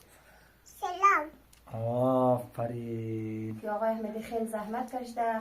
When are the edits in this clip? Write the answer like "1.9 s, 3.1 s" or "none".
3.5 s